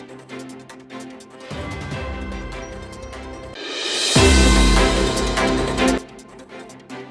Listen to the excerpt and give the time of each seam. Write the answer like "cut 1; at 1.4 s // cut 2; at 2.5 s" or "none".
cut 1; at 3.1 s // cut 2; at 6.0 s